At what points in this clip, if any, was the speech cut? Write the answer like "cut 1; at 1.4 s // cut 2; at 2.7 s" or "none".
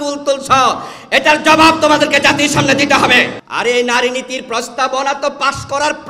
cut 1; at 3.4 s